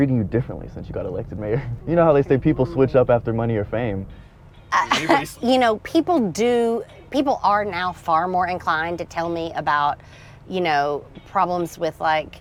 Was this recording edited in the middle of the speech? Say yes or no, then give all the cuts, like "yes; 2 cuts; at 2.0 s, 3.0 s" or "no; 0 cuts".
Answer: no; 0 cuts